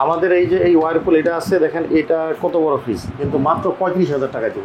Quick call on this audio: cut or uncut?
uncut